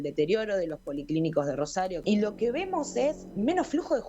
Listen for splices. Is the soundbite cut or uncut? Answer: cut